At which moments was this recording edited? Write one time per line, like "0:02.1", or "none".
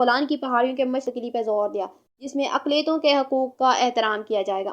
0:01.1